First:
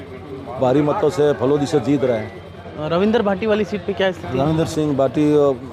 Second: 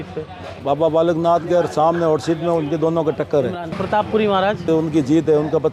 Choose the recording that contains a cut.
second; 2 cuts; at 3.4 s, 4.7 s

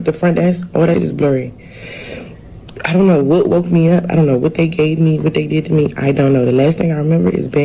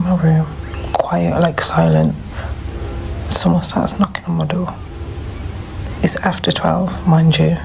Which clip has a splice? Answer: first; 1 cut; at 0.9 s

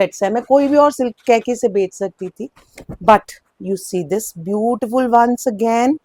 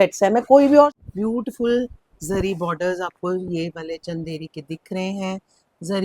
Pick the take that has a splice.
second; 1 cut; at 0.9 s

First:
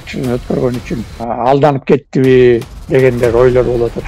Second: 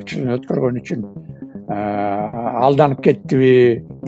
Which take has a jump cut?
first; 1 cut; at 1.2 s

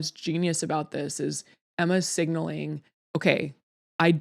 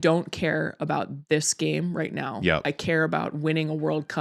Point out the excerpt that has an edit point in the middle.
first; 1 cut; at 2.9 s

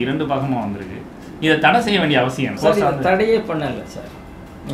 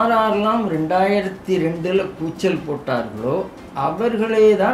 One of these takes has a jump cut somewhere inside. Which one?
first; 1 cut; at 2.6 s

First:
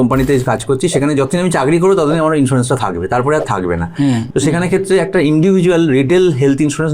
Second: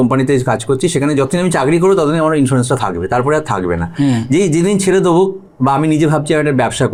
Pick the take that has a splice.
first; 1 cut; at 4.2 s

